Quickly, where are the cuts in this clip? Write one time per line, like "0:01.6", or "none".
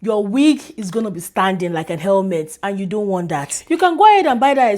0:03.5